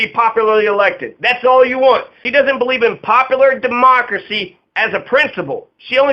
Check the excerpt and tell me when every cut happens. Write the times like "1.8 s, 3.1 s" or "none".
2.2 s